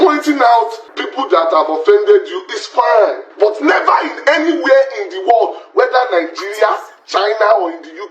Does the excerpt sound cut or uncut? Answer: cut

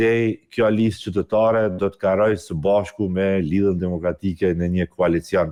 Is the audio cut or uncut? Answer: uncut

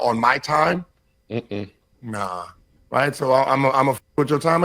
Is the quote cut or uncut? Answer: cut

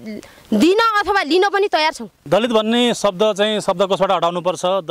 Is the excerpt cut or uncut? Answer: cut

